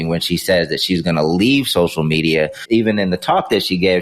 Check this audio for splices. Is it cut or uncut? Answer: cut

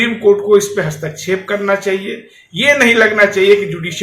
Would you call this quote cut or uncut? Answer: uncut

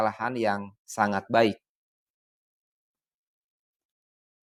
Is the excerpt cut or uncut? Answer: uncut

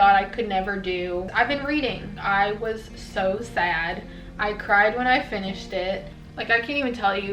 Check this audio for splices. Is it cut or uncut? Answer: cut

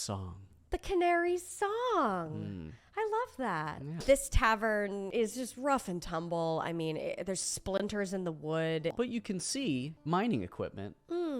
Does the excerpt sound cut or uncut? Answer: cut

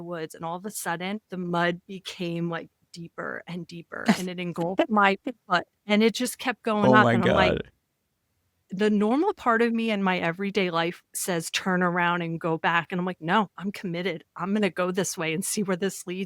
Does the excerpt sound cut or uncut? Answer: cut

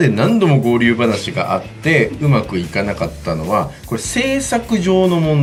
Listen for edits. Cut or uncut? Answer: uncut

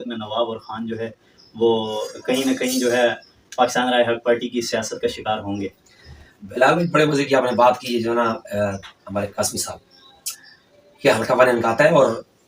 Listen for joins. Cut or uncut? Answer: uncut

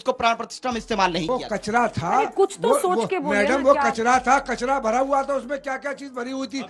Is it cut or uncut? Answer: cut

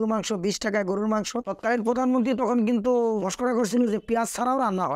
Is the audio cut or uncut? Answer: cut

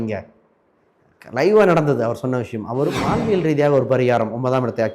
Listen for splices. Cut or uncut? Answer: cut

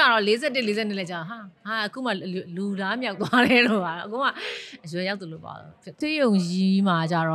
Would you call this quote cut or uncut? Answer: cut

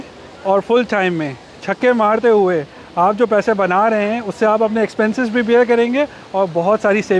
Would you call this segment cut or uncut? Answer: uncut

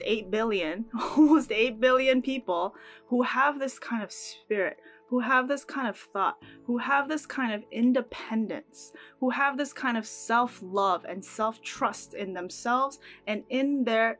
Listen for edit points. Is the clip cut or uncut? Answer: uncut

